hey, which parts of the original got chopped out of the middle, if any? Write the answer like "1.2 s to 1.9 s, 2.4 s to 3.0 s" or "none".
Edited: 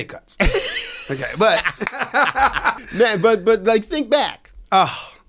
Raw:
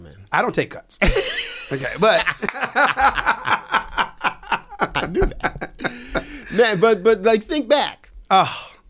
3.4 s to 6.4 s